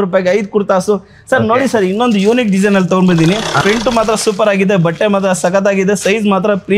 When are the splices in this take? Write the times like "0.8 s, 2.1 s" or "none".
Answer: 3.6 s